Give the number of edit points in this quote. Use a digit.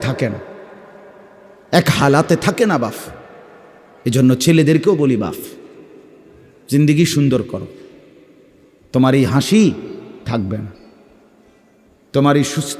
0